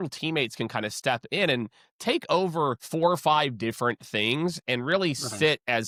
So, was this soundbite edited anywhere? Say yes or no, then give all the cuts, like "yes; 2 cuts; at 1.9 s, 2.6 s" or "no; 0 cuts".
no; 0 cuts